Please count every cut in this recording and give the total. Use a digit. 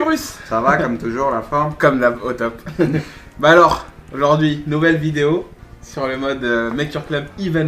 1